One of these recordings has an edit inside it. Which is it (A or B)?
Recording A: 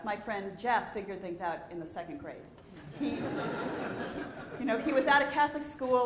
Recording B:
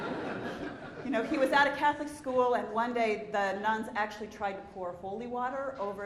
B